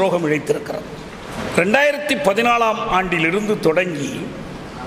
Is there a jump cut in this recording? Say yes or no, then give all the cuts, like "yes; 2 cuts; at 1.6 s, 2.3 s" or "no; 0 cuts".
no; 0 cuts